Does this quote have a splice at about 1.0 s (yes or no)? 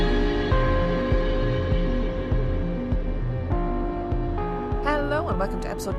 yes